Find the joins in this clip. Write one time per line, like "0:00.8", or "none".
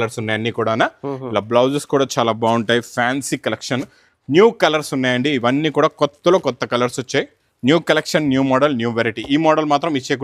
none